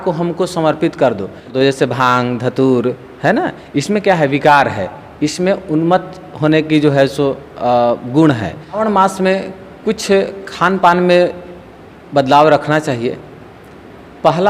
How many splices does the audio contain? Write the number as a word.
two